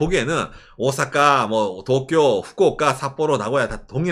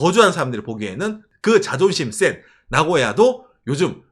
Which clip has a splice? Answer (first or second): second